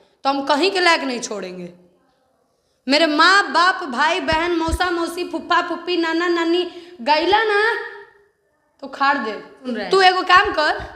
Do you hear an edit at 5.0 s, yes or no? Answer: no